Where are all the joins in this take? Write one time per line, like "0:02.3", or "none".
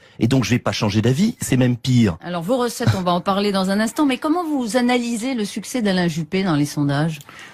none